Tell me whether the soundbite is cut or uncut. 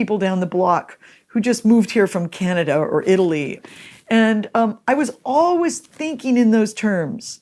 cut